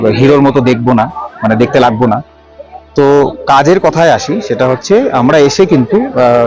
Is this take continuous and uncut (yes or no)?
yes